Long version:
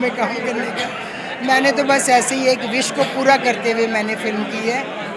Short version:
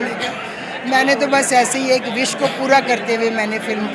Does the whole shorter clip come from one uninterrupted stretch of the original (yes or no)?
yes